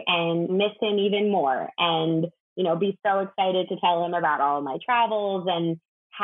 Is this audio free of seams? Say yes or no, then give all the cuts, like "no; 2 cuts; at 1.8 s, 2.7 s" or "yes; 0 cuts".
yes; 0 cuts